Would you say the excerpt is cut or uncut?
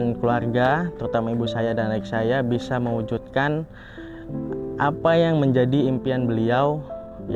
uncut